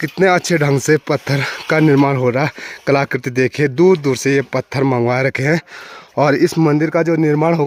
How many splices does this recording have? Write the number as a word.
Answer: zero